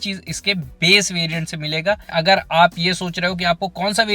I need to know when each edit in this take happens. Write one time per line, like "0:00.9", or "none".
0:02.1